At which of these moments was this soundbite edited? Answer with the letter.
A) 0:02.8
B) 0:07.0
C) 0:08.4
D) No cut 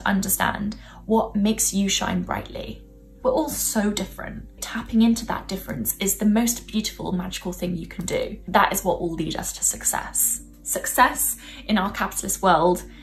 C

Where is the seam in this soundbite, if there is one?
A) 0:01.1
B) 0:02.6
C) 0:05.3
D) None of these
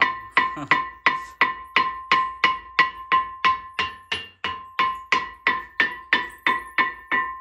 D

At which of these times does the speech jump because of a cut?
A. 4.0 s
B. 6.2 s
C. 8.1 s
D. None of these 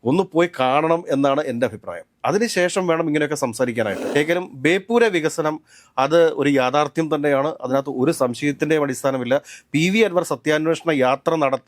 A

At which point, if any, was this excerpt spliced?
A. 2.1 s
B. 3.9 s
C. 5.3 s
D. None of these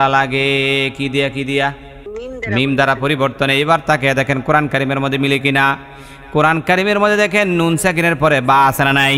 A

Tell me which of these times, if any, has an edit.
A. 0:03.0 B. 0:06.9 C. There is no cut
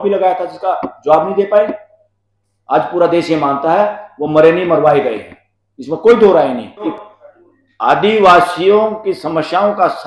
B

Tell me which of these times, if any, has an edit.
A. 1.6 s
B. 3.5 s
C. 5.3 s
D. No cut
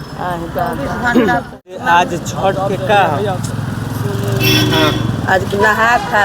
A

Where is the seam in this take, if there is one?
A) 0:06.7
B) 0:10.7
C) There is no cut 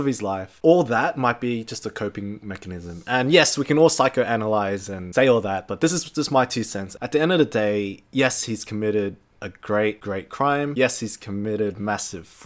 B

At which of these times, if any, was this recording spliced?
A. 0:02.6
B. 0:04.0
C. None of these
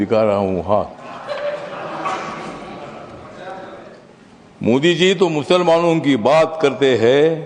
B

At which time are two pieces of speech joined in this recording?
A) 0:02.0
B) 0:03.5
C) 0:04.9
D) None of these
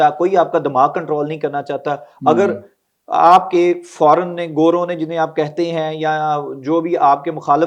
D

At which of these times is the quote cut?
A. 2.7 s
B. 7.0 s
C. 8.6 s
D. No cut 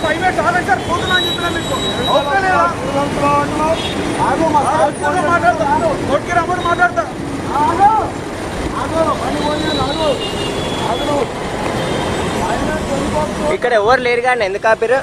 B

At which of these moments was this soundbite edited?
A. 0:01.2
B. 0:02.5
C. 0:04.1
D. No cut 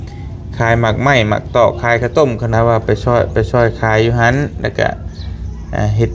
B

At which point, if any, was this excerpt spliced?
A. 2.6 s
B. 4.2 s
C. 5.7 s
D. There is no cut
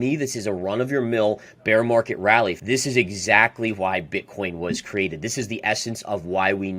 A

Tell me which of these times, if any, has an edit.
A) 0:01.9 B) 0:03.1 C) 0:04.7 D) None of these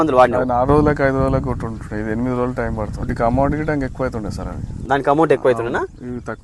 B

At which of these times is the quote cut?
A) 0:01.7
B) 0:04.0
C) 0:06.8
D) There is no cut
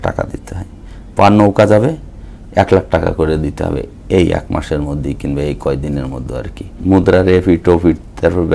C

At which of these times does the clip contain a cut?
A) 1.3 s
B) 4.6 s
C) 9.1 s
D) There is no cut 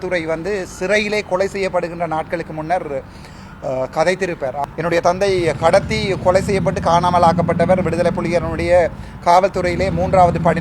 B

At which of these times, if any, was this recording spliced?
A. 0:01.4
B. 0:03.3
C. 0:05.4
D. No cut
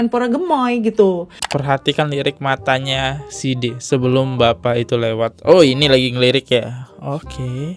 A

